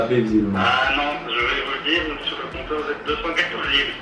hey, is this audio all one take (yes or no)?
yes